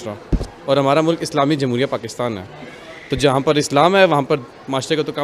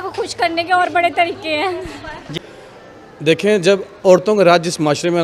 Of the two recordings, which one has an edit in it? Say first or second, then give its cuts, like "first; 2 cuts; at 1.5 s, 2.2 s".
second; 1 cut; at 2.4 s